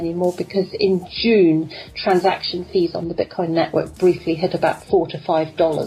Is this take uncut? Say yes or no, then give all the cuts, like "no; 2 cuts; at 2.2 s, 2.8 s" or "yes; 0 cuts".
yes; 0 cuts